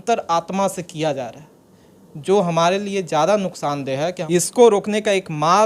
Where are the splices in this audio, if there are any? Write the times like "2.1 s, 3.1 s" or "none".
4.2 s